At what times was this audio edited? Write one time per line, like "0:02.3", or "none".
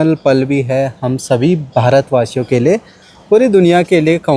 none

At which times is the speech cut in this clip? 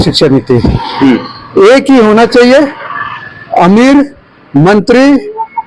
none

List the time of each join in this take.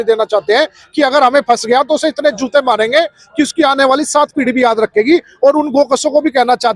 none

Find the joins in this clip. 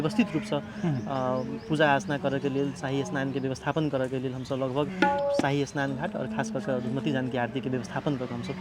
0:05.2

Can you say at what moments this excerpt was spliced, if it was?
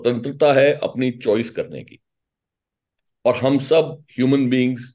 none

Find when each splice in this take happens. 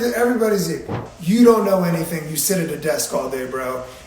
0:01.0

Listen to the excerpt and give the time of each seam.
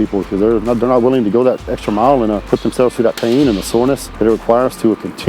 0:02.4
0:04.1

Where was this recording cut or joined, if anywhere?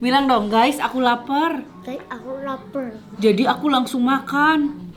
none

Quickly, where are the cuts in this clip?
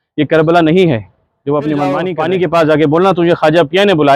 0:02.1

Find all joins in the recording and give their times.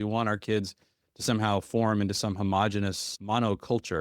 0:03.1

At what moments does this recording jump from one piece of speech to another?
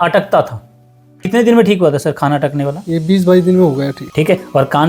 0:01.2

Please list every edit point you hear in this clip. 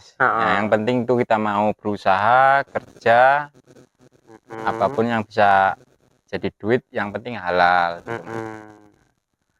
none

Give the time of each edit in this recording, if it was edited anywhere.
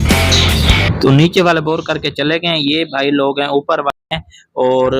0:04.0

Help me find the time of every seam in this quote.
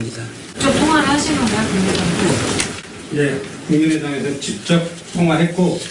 0:01.8

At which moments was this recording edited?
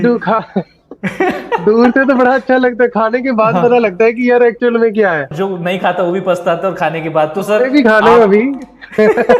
0:05.3

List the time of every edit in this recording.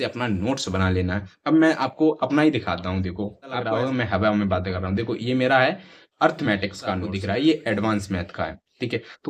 0:03.6
0:07.1

